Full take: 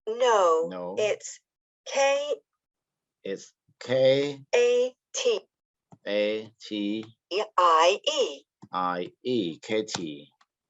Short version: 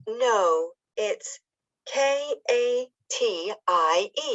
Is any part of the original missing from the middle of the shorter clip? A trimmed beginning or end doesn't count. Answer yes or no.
yes